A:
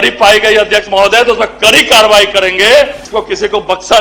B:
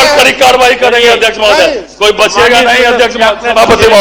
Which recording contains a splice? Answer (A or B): A